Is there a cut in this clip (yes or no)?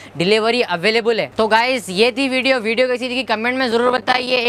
no